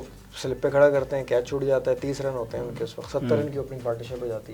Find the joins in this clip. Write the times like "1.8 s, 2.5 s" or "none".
none